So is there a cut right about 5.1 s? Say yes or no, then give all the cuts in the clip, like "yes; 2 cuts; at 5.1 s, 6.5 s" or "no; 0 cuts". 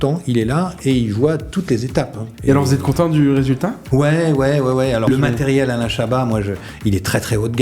yes; 3 cuts; at 2.2 s, 3.8 s, 5.1 s